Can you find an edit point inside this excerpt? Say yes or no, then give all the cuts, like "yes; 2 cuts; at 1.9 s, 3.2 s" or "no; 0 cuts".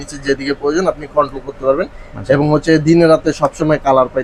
no; 0 cuts